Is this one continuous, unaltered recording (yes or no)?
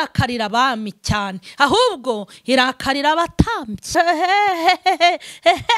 no